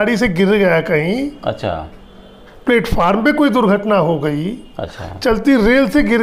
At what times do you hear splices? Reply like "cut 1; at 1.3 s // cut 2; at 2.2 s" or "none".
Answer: none